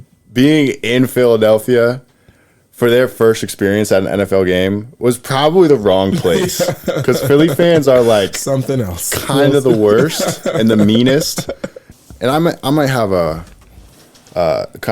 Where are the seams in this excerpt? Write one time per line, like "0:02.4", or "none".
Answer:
0:12.0